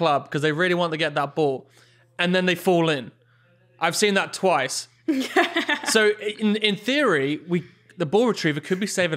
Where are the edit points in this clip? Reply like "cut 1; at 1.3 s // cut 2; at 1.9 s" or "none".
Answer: none